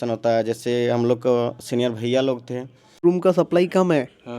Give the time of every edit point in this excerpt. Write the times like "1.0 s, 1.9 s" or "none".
3.0 s